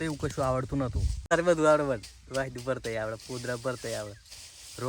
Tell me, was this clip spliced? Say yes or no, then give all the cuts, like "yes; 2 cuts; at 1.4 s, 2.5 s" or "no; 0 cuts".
yes; 1 cut; at 1.3 s